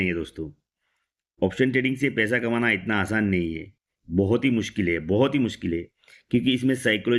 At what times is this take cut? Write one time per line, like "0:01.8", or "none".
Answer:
none